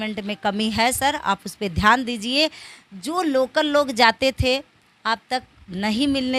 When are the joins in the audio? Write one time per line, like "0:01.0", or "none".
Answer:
none